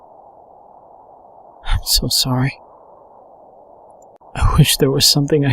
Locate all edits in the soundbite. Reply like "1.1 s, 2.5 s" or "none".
1.6 s